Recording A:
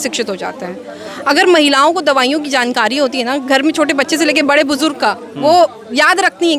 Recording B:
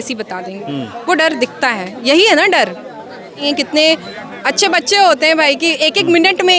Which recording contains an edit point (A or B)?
B